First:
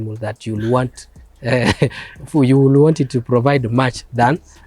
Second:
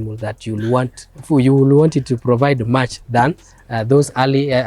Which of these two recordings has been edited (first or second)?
second